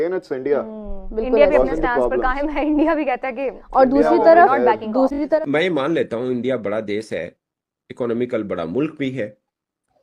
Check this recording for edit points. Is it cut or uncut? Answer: cut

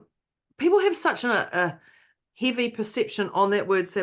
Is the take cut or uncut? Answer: cut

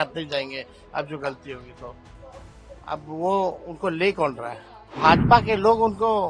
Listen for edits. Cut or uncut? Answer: cut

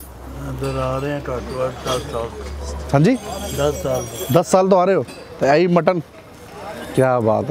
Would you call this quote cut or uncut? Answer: uncut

